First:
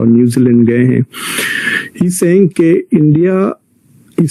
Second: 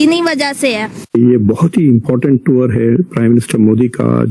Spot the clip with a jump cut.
second; 1 cut; at 0.9 s

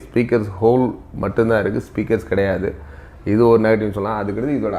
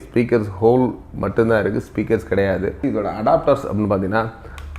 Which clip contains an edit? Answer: second; 1 cut; at 2.8 s

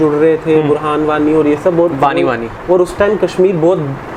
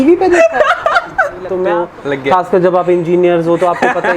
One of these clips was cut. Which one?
second; 1 cut; at 1.6 s

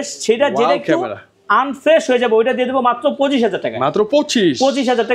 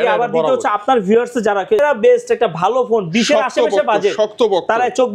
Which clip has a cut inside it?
second; 1 cut; at 1.8 s

